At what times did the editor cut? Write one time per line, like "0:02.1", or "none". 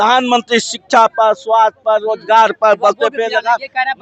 none